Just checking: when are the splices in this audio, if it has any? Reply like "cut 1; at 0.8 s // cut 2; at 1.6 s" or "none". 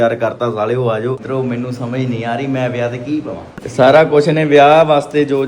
cut 1; at 1.2 s // cut 2; at 3.6 s